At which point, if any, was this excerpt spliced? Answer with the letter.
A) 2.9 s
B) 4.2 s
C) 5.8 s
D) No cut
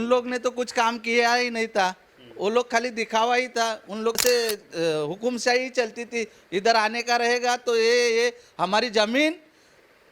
B